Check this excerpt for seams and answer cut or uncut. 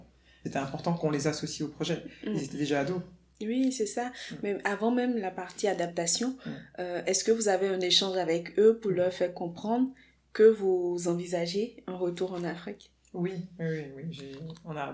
uncut